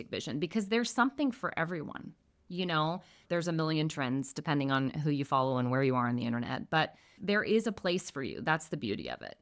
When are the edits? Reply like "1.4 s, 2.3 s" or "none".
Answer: 3.2 s, 7.2 s